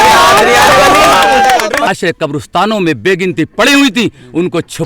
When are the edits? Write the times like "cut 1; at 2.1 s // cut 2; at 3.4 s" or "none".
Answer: cut 1; at 1.9 s